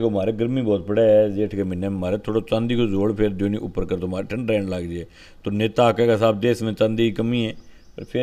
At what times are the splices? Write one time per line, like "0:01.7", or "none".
none